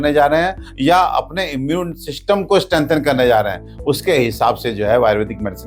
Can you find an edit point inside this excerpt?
no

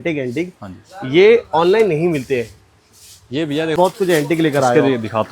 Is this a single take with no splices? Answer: no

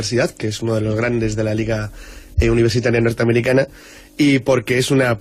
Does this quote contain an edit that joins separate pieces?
no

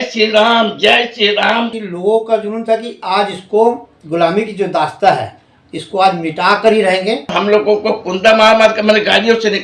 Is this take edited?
yes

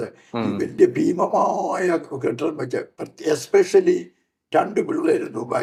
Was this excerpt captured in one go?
yes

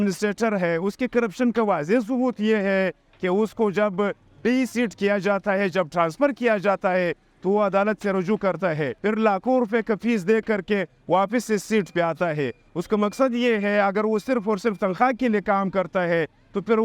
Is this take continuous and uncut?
yes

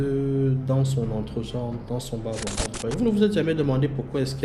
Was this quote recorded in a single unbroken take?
no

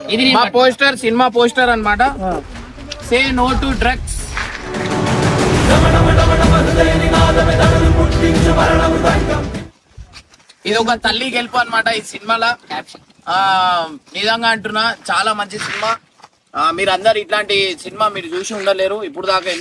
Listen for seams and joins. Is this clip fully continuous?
yes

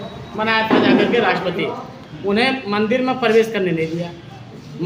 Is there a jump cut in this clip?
no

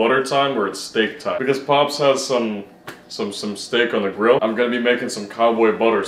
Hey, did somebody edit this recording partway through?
no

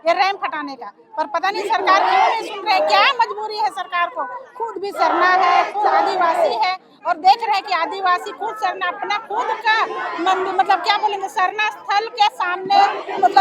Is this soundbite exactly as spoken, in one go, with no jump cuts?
yes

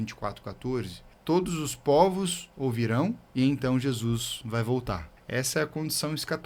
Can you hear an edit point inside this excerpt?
yes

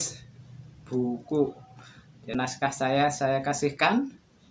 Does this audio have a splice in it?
yes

